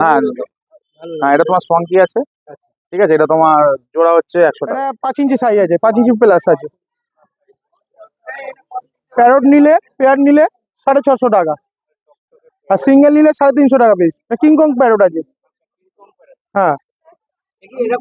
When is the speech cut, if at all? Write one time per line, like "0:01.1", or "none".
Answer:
0:05.0